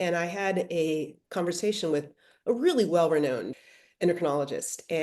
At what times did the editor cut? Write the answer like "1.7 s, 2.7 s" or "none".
3.6 s